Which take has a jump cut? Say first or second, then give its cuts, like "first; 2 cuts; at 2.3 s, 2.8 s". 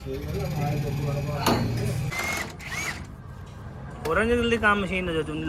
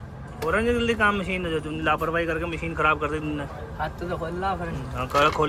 first; 1 cut; at 2.1 s